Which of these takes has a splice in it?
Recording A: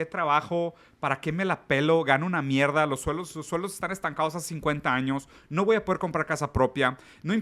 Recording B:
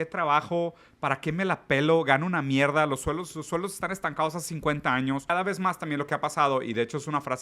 B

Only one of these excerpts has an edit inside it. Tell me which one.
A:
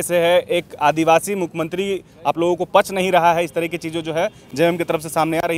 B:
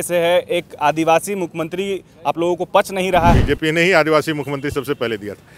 B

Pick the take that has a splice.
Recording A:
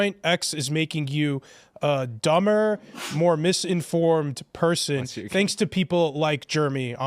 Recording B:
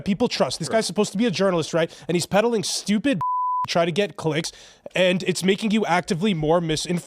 B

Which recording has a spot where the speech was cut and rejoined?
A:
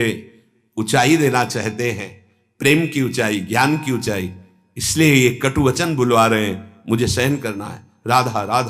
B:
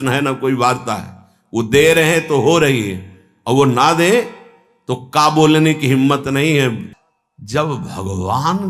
B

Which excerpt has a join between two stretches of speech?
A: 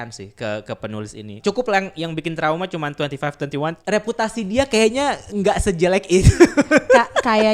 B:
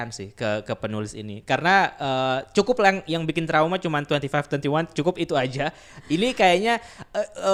A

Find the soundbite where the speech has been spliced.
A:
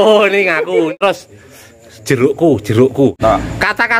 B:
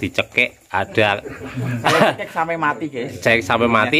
A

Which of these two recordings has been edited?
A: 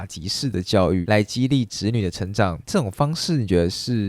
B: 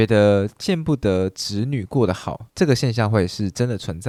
A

